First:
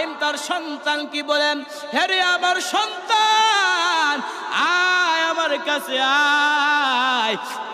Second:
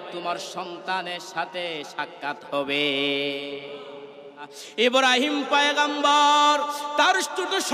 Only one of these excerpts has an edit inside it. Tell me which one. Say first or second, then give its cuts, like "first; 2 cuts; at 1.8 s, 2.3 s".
second; 1 cut; at 4.6 s